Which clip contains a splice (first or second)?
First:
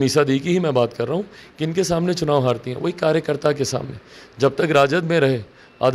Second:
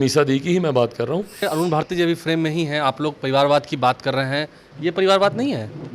second